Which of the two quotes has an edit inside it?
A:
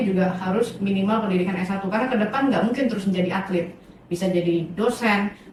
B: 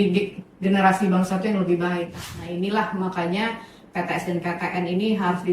B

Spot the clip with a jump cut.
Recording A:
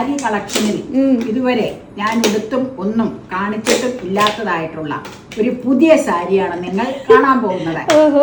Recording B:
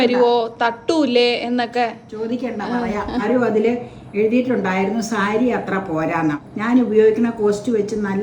B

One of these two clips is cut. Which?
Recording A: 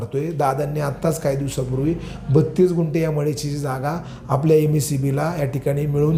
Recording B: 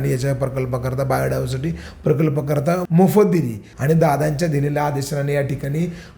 B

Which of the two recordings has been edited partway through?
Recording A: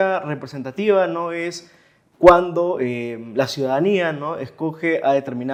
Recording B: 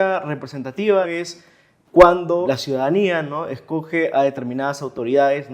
B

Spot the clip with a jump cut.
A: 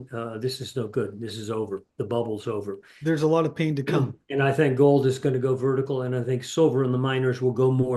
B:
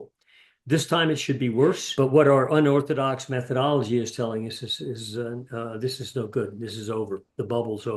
B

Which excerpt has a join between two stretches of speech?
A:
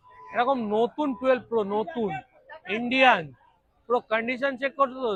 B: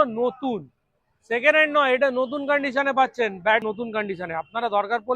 B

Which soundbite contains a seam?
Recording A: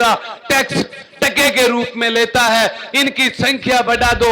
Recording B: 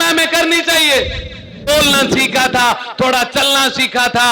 B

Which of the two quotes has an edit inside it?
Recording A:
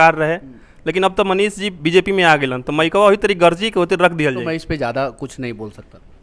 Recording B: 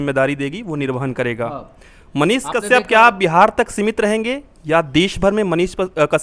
A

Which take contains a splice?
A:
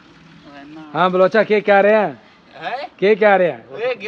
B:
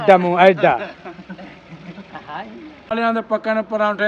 B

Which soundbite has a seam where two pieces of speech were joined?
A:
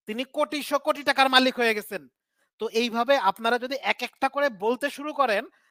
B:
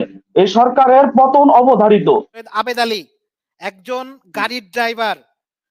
B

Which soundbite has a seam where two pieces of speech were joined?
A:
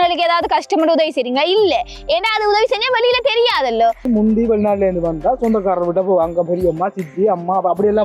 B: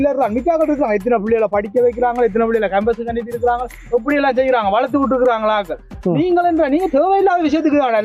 A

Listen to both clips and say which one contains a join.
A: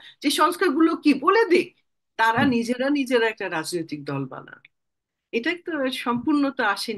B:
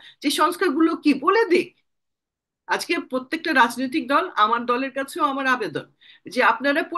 A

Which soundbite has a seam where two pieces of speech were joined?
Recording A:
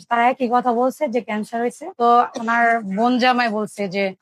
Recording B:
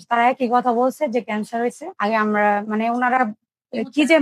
A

